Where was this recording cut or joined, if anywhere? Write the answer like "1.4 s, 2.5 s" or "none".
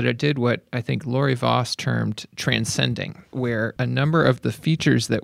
2.2 s, 3.6 s